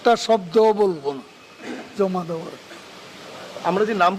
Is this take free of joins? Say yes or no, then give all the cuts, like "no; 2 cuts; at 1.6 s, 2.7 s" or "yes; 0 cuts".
yes; 0 cuts